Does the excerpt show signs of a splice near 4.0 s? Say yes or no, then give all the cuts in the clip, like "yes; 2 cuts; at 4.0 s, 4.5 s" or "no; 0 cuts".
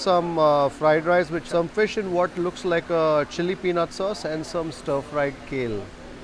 no; 1 cut; at 1.4 s